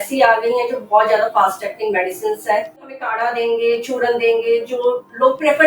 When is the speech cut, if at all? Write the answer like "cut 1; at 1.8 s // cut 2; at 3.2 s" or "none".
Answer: cut 1; at 3.0 s